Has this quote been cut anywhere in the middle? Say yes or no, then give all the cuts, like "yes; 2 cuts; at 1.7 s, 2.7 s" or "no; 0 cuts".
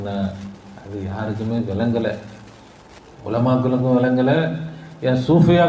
no; 0 cuts